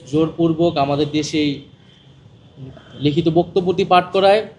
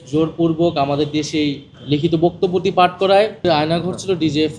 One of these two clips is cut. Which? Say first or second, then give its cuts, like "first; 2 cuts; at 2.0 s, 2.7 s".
second; 2 cuts; at 1.7 s, 3.4 s